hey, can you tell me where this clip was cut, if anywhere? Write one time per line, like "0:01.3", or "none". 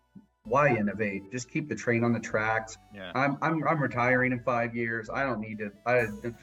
none